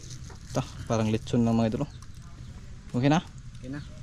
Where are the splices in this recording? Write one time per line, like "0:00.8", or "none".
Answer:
none